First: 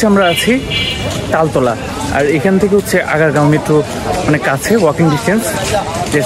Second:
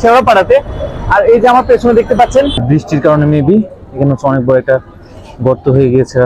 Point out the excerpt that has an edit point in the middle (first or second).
second